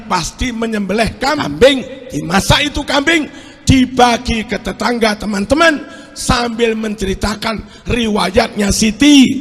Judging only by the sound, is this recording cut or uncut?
cut